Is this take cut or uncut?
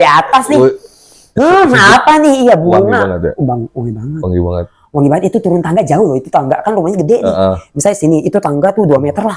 uncut